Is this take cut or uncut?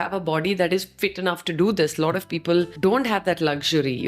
cut